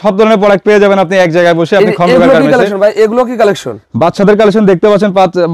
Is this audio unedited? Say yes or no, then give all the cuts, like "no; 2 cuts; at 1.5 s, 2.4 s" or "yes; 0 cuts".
yes; 0 cuts